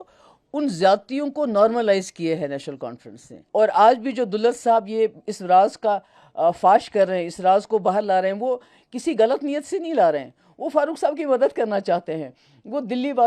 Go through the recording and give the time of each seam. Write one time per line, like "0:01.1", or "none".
0:03.4